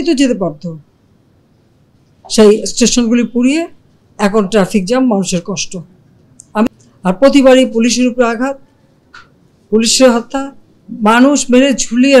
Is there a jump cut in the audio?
yes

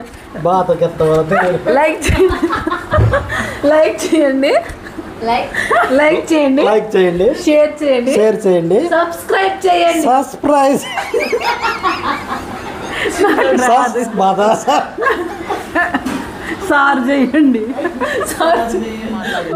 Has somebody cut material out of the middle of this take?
no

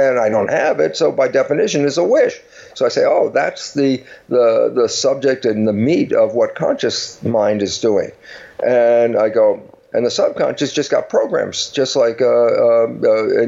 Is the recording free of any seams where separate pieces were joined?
yes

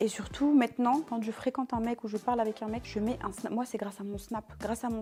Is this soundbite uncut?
yes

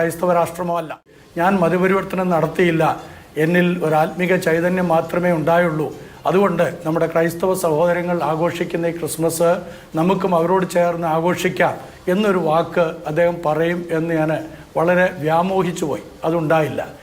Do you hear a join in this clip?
yes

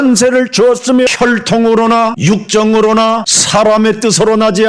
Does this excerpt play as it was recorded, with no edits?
no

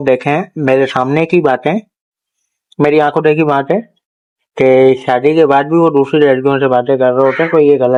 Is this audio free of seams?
yes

